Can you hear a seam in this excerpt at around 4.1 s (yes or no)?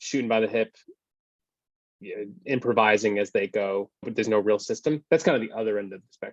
yes